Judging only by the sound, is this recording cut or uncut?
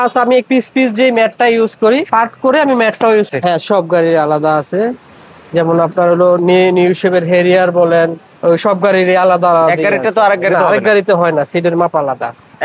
cut